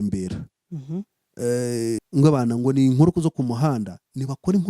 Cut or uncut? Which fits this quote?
cut